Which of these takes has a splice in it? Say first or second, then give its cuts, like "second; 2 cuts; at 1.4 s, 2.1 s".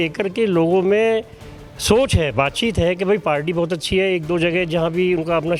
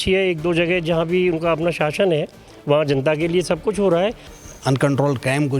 second; 1 cut; at 4.3 s